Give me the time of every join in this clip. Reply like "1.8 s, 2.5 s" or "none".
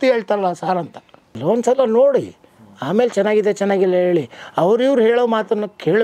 1.3 s